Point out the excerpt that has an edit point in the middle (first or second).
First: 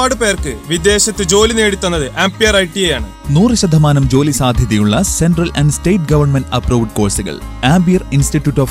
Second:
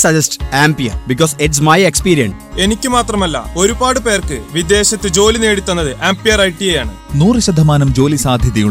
second